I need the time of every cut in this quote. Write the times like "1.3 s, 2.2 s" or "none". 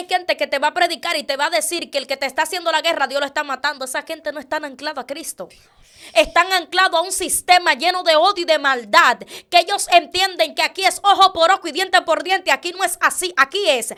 none